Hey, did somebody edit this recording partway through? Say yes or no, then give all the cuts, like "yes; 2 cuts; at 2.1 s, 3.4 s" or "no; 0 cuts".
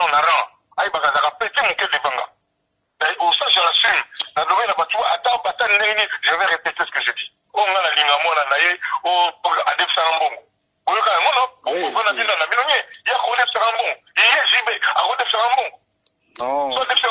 no; 0 cuts